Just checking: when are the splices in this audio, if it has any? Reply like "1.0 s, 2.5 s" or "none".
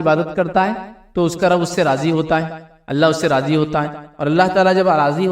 none

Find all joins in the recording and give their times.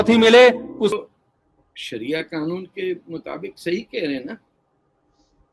0.9 s

